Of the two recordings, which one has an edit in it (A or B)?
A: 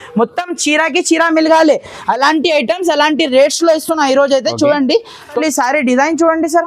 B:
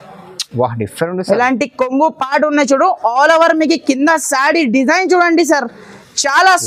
A